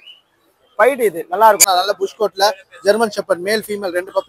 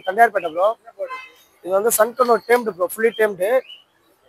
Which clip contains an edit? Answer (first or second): first